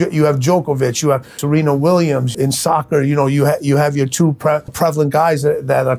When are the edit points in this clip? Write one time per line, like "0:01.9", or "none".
0:01.4
0:02.3
0:04.7